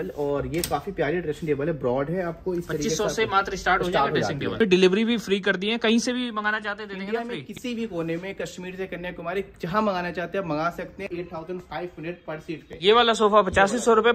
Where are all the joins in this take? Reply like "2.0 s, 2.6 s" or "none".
4.6 s, 11.1 s